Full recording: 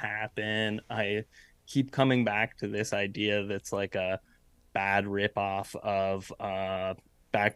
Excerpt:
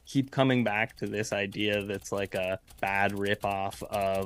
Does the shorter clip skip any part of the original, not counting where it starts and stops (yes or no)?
yes